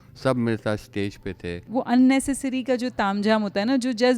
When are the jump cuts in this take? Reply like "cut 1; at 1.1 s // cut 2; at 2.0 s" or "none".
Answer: cut 1; at 1.6 s